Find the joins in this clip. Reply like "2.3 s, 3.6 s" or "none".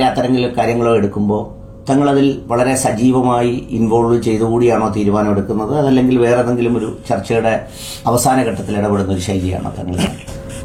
none